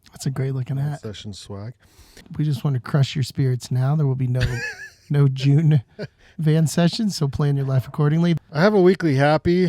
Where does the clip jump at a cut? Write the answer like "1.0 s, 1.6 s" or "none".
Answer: 2.2 s, 8.4 s